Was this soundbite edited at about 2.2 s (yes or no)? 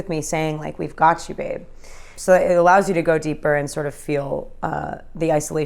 yes